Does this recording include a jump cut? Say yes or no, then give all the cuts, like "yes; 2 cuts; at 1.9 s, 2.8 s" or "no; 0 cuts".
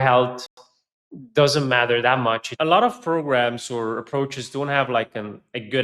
yes; 1 cut; at 2.5 s